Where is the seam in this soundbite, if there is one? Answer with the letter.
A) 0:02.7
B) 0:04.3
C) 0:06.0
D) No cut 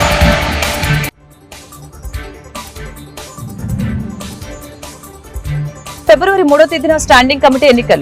B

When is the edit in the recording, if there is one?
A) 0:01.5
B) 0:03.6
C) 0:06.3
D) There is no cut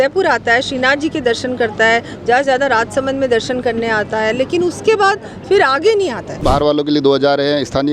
C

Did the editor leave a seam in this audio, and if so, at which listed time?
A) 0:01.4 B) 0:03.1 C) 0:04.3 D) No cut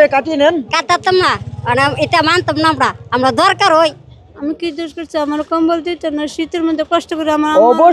C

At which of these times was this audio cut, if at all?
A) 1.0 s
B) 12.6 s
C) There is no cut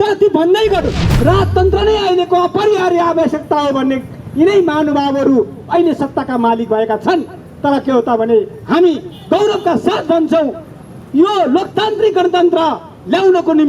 A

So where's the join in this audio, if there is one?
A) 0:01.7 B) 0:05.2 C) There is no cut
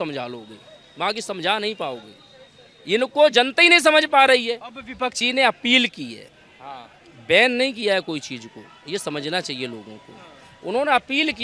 B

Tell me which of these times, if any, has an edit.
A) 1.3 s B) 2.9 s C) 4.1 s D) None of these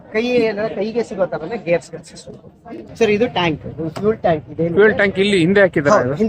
B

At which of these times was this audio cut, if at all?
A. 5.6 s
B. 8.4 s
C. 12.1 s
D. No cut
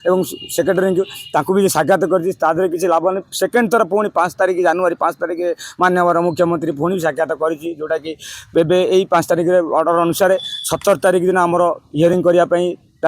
C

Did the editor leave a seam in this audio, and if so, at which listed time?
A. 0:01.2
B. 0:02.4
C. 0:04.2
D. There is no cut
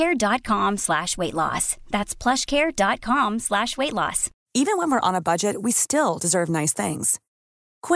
C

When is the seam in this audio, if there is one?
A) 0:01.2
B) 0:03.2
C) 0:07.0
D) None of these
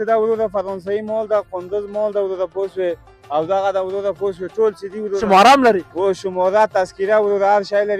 D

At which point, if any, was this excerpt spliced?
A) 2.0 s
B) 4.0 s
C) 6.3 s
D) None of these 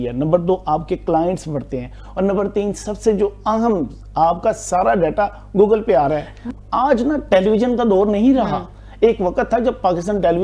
C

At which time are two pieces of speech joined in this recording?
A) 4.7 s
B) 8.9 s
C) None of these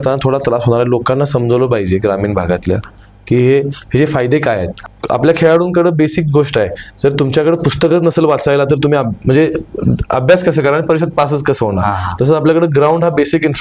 A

